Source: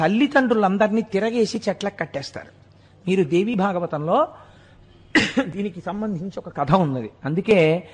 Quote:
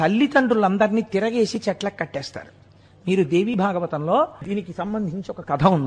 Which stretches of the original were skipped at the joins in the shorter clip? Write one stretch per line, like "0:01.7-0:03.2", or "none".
0:04.4-0:05.5